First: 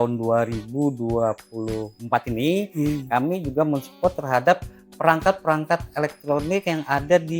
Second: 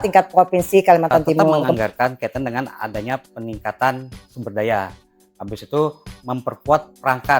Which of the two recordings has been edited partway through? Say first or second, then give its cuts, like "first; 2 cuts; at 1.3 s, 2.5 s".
second; 1 cut; at 1.7 s